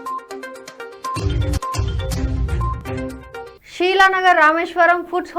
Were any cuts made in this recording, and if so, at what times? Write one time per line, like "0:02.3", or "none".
0:03.5